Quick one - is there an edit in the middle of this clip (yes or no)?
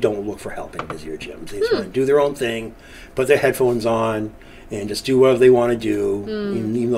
no